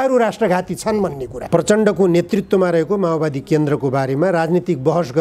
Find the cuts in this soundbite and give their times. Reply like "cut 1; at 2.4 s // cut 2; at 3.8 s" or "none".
cut 1; at 1.3 s